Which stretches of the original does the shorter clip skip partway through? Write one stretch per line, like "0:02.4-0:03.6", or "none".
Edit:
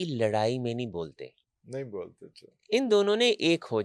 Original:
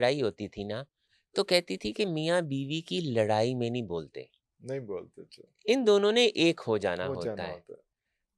none